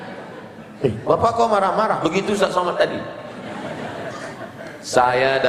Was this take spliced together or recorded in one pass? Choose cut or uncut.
uncut